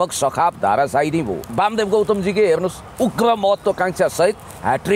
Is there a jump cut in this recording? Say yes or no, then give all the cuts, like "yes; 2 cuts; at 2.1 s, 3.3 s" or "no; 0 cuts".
yes; 1 cut; at 1.5 s